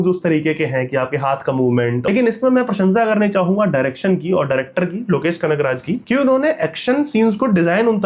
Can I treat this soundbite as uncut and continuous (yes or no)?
no